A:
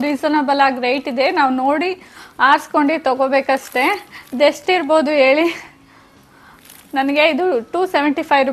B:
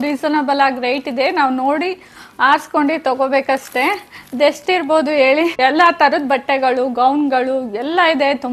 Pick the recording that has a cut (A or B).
B